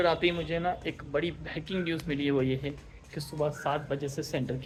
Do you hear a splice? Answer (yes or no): no